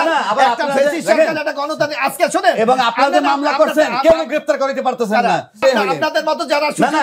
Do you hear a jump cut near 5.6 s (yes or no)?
yes